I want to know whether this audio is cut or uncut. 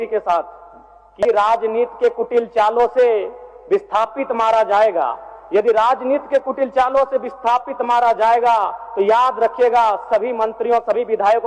cut